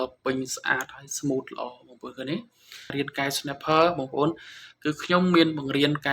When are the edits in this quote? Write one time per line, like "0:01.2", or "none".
0:02.9

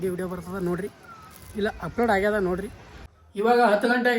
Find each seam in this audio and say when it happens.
0:03.2

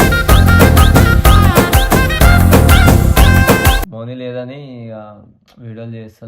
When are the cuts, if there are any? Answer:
0:03.9

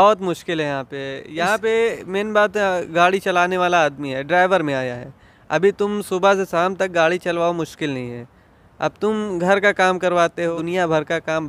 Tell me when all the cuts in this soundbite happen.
0:10.5

